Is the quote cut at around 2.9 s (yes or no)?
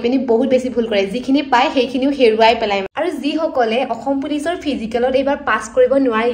yes